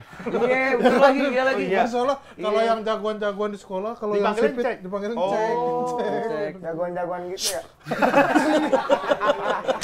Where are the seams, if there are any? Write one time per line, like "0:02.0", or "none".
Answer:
none